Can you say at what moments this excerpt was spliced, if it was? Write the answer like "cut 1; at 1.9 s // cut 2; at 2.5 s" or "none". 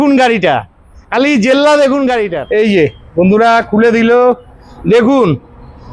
cut 1; at 2.3 s